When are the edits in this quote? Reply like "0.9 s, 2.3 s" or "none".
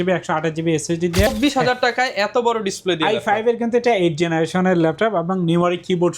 1.3 s